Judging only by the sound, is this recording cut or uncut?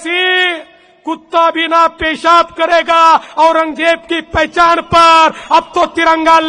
uncut